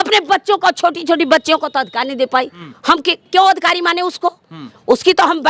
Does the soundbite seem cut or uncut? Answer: cut